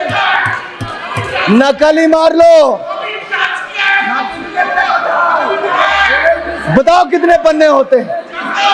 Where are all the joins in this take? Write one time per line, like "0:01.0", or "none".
none